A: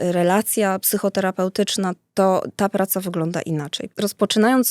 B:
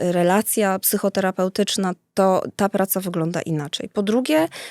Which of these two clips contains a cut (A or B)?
A